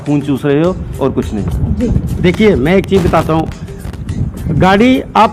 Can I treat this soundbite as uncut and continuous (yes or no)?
yes